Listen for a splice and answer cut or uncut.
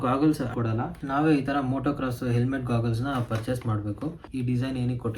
cut